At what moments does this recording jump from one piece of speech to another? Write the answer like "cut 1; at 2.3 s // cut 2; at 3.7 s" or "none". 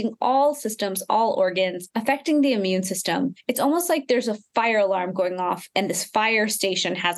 cut 1; at 1.9 s // cut 2; at 3.4 s